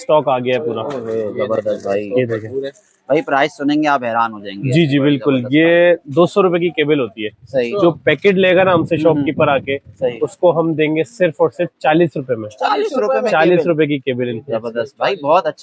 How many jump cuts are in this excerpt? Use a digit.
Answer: 0